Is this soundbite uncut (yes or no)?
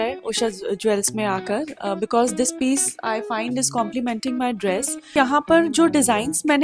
no